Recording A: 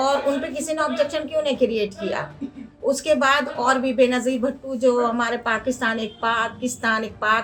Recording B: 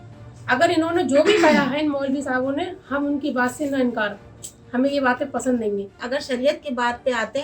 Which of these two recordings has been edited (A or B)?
B